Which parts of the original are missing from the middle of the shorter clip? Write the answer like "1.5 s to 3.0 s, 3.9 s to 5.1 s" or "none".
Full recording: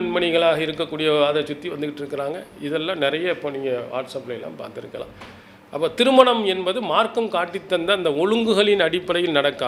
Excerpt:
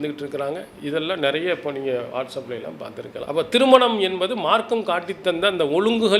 5.0 s to 5.7 s